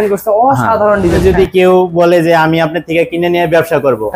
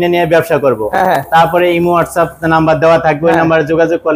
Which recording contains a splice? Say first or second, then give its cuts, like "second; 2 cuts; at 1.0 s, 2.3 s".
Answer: first; 1 cut; at 1.0 s